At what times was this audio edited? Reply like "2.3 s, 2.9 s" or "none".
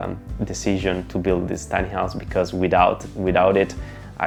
none